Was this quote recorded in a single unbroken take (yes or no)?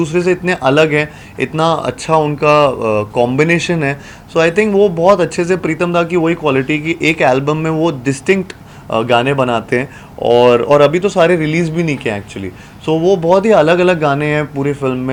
yes